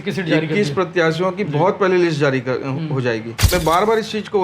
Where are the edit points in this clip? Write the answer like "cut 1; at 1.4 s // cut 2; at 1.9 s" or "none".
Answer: cut 1; at 3.5 s